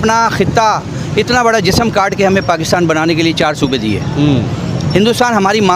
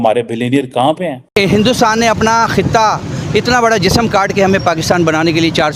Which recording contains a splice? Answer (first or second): second